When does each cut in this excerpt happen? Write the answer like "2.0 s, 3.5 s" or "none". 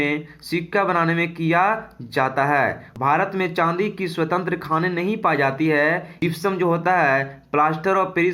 2.9 s, 6.1 s